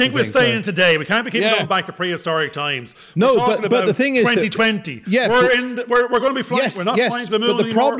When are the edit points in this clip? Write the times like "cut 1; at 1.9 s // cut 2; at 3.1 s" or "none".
none